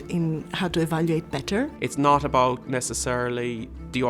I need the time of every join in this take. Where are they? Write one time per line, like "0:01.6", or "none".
0:01.8